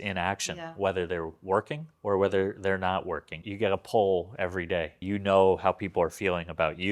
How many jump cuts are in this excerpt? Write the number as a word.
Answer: two